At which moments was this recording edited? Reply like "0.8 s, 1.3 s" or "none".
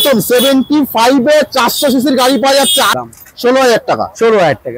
3.0 s